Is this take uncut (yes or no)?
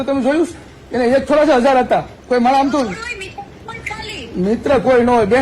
no